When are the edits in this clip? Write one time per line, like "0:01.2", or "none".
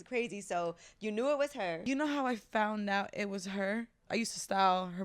0:01.8
0:04.1